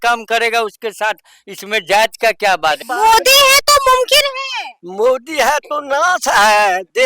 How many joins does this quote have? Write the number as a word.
one